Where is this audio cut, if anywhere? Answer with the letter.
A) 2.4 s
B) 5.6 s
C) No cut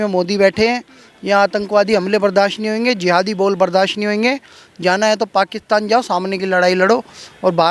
C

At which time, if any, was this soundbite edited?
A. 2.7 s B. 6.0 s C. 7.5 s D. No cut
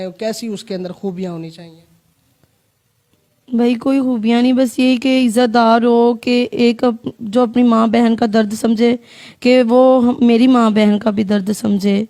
D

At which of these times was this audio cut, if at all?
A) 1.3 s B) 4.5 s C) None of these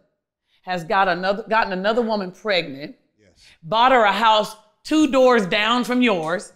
C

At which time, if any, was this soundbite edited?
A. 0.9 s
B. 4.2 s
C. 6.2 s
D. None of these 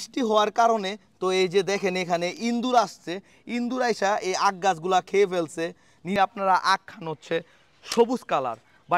C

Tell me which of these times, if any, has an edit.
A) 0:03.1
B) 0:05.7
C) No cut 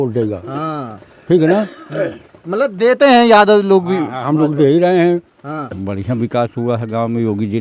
B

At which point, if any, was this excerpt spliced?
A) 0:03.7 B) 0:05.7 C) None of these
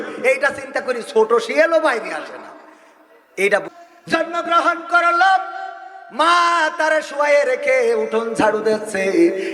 A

